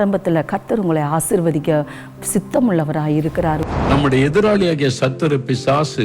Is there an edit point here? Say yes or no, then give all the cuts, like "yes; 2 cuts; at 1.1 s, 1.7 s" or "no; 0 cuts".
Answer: yes; 1 cut; at 3.6 s